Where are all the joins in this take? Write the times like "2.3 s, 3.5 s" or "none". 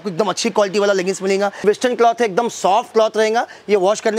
1.6 s